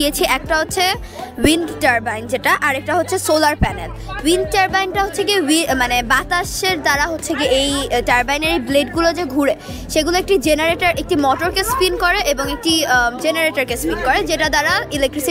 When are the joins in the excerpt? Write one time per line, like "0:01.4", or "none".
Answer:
none

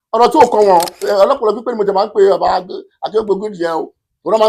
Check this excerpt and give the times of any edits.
0:01.1

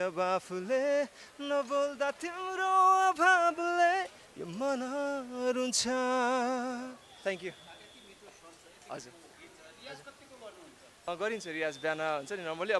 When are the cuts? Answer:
none

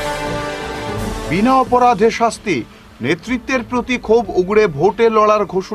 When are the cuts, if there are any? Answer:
0:01.0

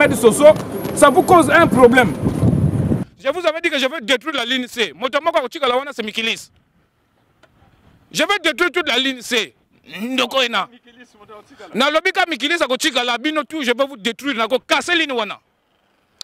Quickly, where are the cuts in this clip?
0:03.0

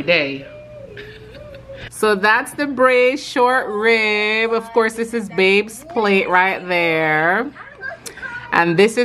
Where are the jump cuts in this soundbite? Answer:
0:01.8

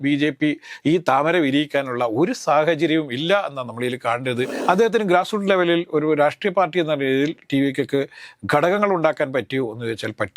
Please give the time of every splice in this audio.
0:04.6

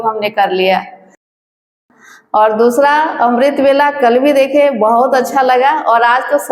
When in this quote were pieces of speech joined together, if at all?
0:01.5

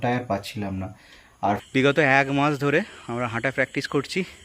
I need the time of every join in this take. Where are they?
0:01.6

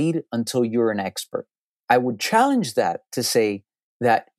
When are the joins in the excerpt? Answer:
0:01.7

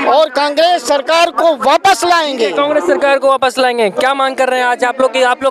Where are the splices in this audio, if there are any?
none

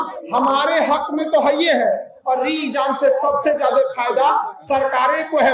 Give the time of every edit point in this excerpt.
none

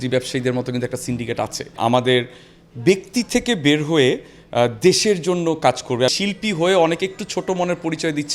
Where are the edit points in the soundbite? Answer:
0:01.7
0:06.1

